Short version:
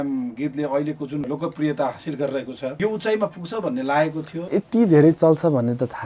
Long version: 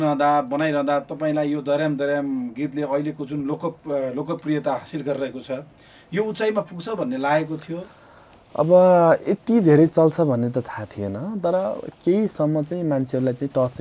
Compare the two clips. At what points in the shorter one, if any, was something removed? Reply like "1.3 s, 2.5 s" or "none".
1.2 s, 2.7 s, 4.6 s